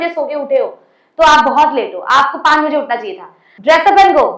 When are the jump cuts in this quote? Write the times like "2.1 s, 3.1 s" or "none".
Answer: 3.4 s